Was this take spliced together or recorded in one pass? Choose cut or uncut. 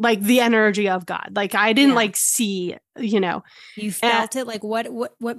uncut